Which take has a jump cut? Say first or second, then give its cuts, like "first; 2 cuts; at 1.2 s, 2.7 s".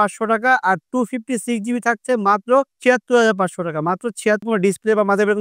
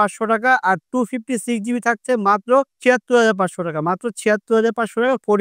first; 1 cut; at 4.4 s